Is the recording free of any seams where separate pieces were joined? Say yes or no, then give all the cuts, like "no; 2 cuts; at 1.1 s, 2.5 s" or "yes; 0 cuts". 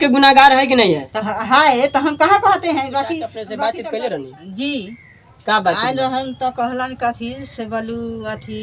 no; 1 cut; at 3.4 s